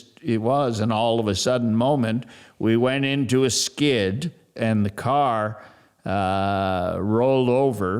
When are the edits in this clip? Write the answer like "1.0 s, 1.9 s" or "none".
4.5 s

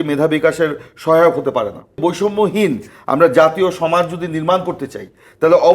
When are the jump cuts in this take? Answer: 2.0 s

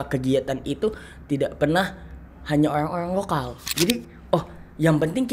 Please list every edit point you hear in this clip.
3.6 s

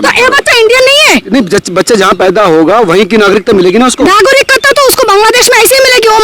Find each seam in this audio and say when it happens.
none

